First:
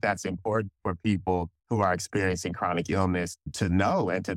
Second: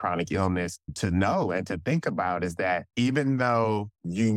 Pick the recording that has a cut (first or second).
second